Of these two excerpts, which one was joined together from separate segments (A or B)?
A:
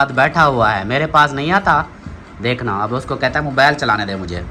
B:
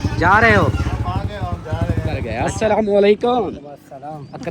B